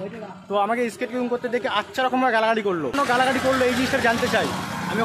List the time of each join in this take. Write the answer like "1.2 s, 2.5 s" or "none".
3.0 s